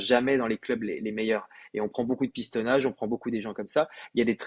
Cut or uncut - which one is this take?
uncut